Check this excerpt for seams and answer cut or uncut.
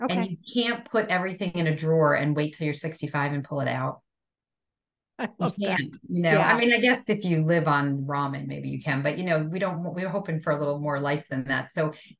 uncut